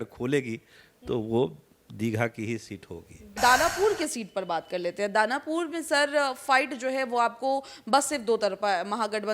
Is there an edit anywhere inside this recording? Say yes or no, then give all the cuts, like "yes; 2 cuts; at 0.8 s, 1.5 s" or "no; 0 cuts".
yes; 1 cut; at 3.3 s